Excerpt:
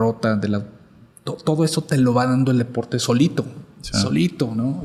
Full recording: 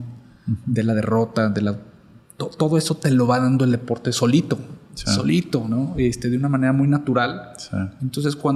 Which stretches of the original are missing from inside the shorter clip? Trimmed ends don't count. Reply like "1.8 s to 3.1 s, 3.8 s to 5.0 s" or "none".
none